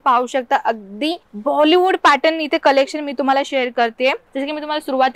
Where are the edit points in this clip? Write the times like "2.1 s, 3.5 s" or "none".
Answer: 1.3 s, 4.3 s